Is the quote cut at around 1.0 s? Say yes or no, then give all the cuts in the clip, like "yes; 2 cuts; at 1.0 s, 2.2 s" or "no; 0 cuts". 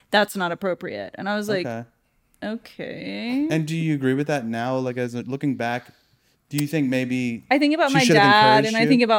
no; 0 cuts